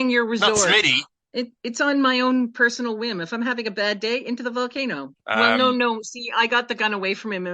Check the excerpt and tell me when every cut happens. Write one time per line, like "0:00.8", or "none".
0:01.2
0:05.1